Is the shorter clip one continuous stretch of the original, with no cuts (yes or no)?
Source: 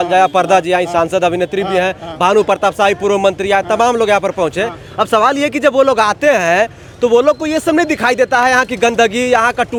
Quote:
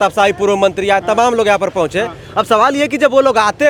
yes